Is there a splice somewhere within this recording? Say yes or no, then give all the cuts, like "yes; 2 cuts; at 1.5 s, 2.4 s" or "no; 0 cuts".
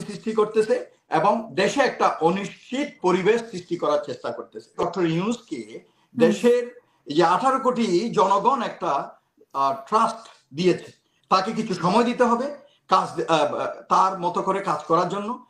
yes; 1 cut; at 4.8 s